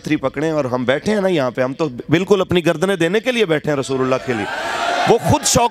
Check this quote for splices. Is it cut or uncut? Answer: uncut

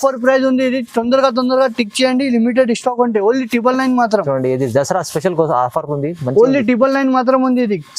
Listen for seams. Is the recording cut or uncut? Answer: uncut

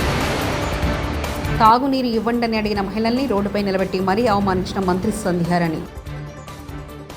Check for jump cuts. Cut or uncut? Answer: cut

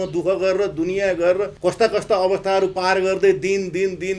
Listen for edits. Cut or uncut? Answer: cut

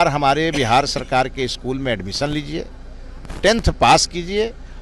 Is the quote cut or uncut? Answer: uncut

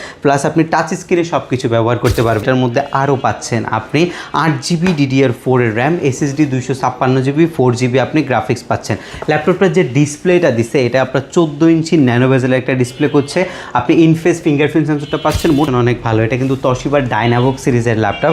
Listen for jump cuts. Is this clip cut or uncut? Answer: cut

